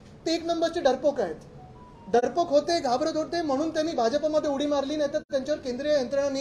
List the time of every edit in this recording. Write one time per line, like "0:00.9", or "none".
none